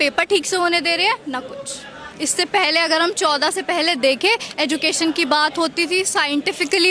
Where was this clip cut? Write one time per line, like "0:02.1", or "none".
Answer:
0:02.0